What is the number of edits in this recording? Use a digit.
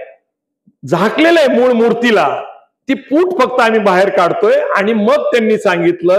0